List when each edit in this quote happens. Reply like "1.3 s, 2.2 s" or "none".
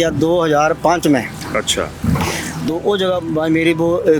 none